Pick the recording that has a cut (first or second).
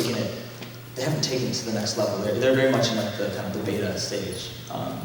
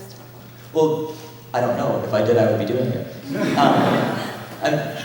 second